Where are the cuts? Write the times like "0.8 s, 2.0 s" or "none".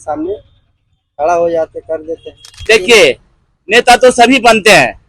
2.5 s